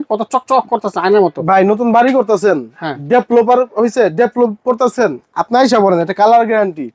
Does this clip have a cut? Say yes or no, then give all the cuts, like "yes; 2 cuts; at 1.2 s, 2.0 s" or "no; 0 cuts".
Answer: no; 0 cuts